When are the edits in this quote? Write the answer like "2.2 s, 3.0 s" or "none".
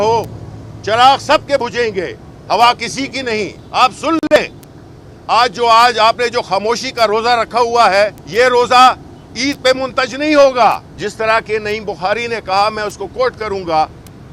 3.6 s, 8.2 s, 10.9 s